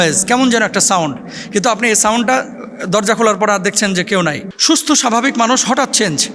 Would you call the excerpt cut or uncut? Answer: cut